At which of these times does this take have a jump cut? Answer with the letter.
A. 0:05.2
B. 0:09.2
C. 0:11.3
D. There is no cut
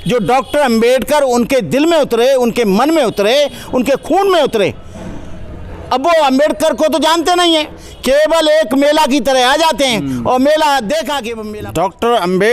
C